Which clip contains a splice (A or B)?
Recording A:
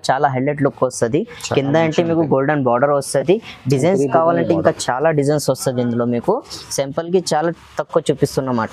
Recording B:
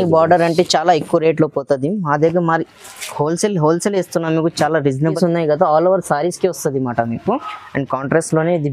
B